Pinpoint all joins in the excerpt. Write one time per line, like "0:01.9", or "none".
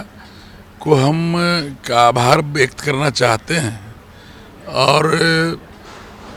none